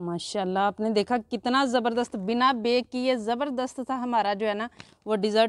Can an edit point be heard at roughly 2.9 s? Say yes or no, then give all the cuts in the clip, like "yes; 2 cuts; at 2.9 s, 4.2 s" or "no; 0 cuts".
no; 0 cuts